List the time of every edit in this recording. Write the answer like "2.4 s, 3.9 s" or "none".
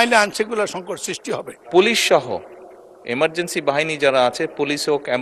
1.6 s